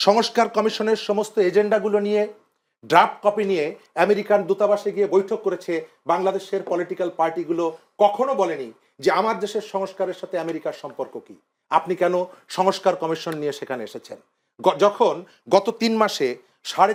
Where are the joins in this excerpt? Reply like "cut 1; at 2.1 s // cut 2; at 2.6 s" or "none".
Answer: none